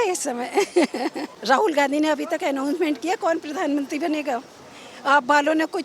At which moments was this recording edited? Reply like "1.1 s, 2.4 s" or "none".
1.3 s

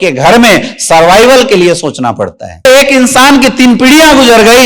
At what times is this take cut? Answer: 2.7 s

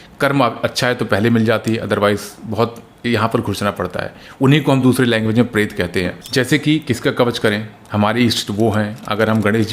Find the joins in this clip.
6.2 s

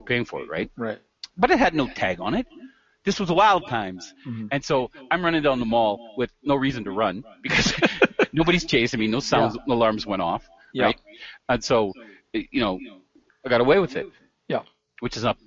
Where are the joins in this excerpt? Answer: none

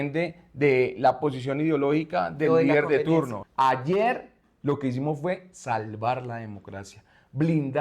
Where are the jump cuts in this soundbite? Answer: 3.4 s

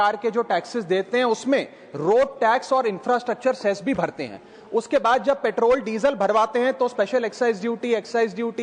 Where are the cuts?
none

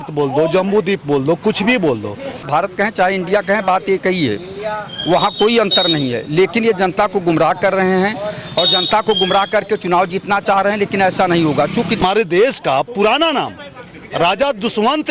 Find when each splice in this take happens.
2.5 s, 12.0 s

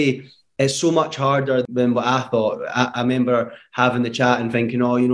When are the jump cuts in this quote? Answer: 1.6 s

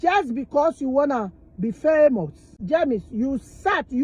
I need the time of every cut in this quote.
2.5 s

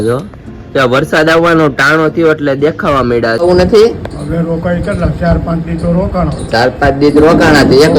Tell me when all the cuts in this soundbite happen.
3.4 s

